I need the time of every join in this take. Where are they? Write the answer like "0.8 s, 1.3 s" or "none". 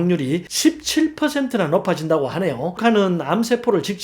2.8 s